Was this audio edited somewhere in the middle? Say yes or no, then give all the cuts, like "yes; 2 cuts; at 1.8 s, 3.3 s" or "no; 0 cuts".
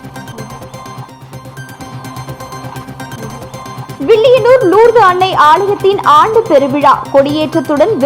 no; 0 cuts